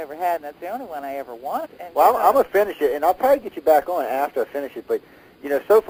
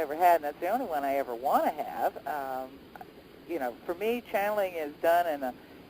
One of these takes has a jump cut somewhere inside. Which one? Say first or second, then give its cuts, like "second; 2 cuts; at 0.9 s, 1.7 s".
second; 1 cut; at 1.6 s